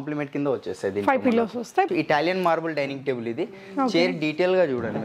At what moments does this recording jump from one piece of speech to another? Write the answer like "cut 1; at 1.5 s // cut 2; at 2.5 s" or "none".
cut 1; at 1.9 s